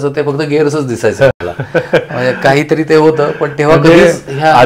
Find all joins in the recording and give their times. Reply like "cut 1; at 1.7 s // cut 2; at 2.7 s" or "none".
none